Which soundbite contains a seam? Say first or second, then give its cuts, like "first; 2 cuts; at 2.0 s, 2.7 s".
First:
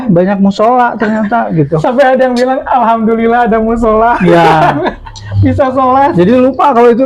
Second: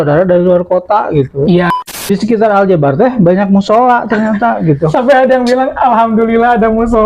second; 1 cut; at 1.9 s